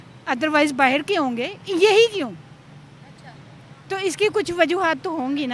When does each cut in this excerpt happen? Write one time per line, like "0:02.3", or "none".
none